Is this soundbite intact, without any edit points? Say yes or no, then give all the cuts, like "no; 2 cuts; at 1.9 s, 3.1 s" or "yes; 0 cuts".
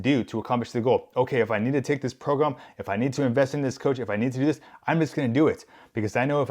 yes; 0 cuts